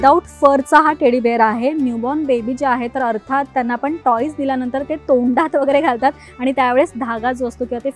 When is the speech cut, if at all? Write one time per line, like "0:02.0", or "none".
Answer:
none